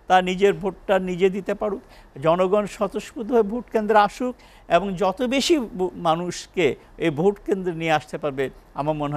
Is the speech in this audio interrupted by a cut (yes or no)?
no